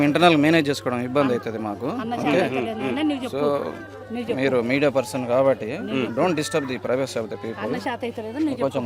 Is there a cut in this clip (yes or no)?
no